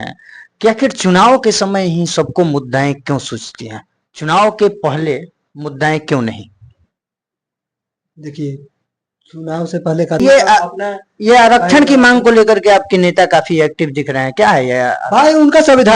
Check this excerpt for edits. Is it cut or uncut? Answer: cut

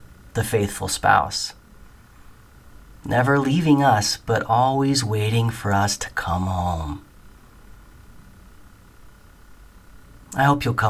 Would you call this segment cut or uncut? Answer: uncut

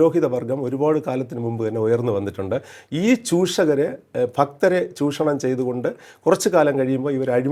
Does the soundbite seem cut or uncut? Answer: uncut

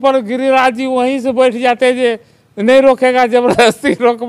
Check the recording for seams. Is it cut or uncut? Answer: uncut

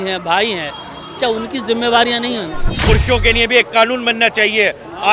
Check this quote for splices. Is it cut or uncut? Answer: cut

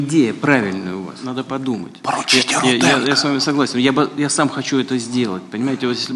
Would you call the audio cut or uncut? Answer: uncut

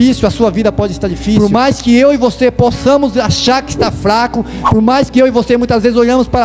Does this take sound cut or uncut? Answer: cut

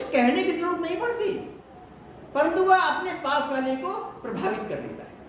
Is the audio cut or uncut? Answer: uncut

